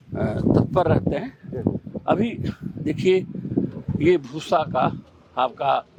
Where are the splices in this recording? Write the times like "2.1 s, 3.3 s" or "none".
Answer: none